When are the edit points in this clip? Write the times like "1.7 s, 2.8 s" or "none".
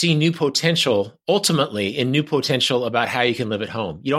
none